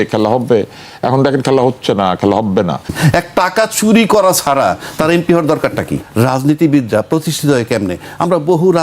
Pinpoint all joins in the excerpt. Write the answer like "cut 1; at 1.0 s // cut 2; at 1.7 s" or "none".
cut 1; at 2.9 s // cut 2; at 6.0 s